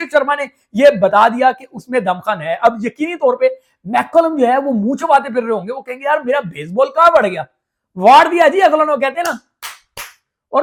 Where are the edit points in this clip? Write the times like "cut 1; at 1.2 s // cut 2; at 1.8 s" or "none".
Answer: none